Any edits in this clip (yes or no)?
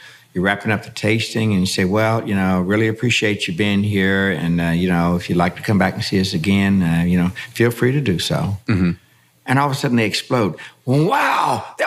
no